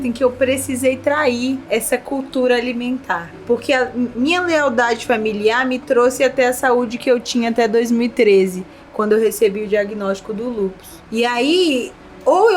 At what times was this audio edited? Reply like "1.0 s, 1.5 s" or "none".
1.6 s, 3.4 s, 10.9 s